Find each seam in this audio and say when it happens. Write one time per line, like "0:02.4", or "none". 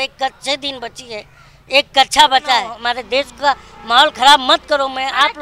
0:02.8